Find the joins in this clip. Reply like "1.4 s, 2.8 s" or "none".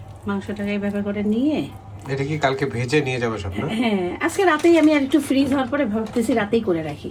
none